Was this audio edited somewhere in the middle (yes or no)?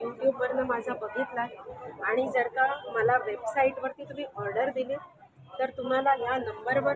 no